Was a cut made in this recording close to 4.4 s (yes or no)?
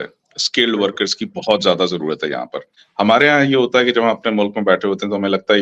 no